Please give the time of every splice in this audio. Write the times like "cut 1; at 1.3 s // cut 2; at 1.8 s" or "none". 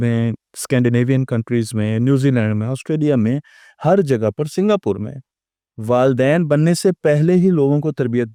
none